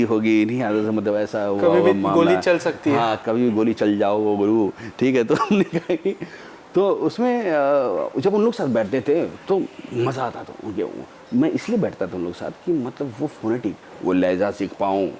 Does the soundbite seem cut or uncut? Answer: uncut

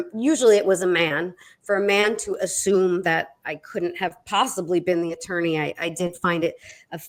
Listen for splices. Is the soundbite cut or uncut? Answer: uncut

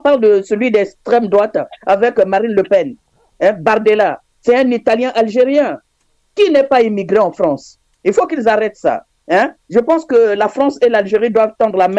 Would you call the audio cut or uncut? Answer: uncut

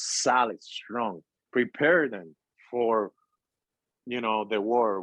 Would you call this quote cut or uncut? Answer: uncut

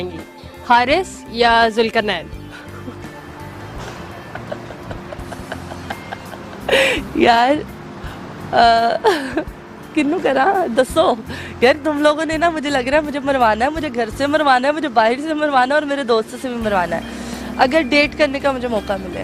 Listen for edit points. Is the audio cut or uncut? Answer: uncut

